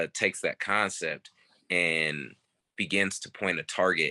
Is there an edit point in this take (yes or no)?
no